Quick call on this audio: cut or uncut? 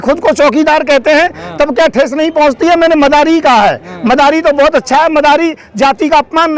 uncut